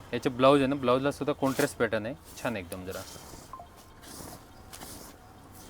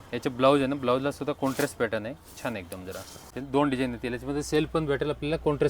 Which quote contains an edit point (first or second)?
second